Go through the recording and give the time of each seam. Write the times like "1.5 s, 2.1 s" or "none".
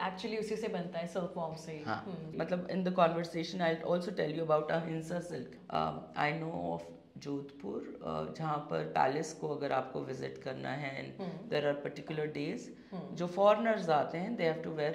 2.3 s, 5.5 s

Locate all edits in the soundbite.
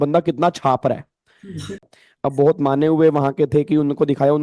1.8 s

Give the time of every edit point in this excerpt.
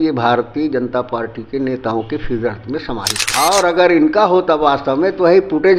3.3 s

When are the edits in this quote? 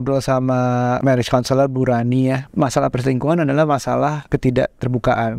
1.0 s, 2.5 s, 4.2 s

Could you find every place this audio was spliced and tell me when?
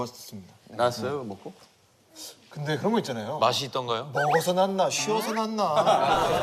none

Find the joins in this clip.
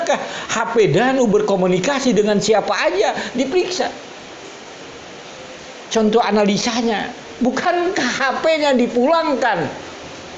none

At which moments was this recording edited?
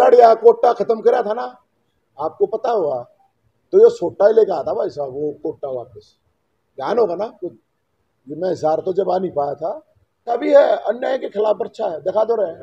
10.4 s

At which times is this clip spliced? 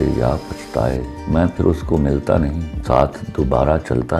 1.1 s, 2.7 s

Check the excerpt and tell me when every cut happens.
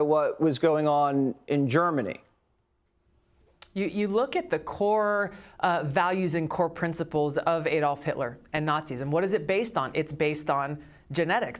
none

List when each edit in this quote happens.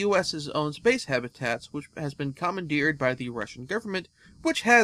2.0 s

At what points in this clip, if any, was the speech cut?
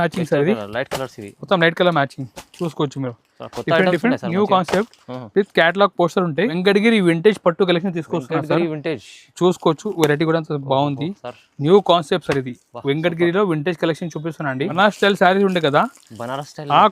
6.6 s, 14.7 s

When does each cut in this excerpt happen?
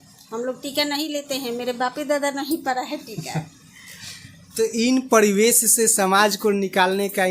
none

